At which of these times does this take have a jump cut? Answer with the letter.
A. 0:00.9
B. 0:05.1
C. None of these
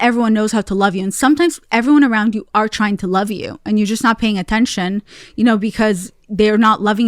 C